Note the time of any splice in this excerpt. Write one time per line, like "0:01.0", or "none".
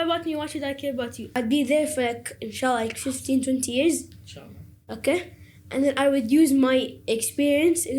0:01.2

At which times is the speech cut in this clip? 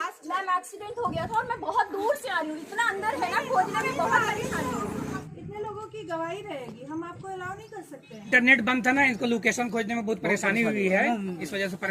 0:05.2
0:08.3

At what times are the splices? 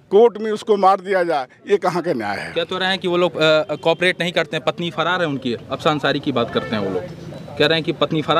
none

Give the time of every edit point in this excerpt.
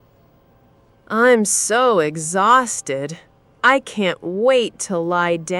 0:01.0

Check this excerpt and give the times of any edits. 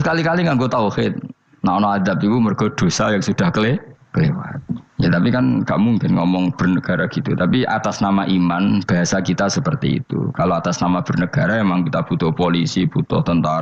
none

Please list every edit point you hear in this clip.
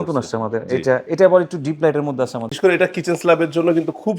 0:02.5

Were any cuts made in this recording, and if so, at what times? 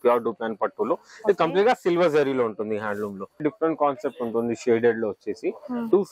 0:03.4

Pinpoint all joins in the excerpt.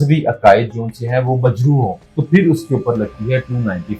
0:02.1

